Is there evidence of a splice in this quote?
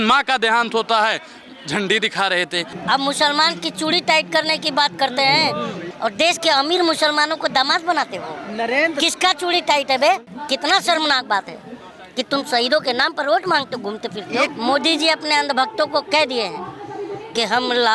yes; 4 cuts; at 2.7 s, 5.8 s, 10.3 s, 14.5 s

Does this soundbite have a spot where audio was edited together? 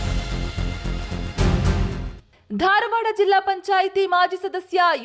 no; 0 cuts

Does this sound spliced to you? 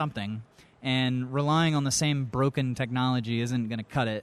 no; 0 cuts

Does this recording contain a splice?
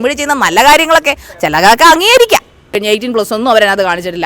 yes; 1 cut; at 2.7 s

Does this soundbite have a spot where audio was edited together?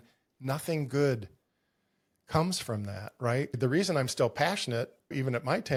no; 0 cuts

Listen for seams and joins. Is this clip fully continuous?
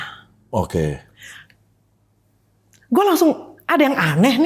yes; 0 cuts

